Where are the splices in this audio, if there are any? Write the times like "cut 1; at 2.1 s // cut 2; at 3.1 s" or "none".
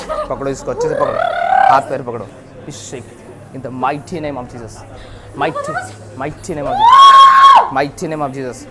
none